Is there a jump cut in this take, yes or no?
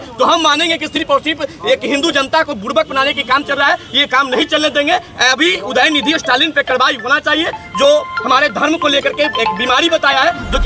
no